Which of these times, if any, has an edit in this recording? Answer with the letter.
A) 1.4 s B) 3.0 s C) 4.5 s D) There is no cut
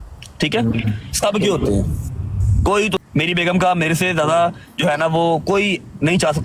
B